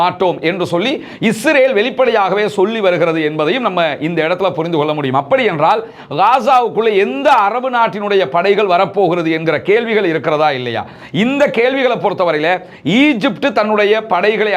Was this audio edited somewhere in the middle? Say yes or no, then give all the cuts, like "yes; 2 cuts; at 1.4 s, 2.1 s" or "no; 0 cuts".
no; 0 cuts